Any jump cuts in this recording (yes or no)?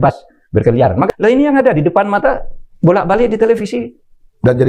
yes